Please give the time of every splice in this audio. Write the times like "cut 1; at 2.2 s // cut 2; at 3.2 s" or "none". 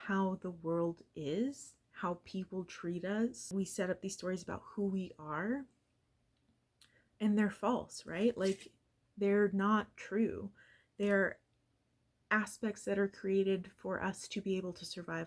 cut 1; at 3.5 s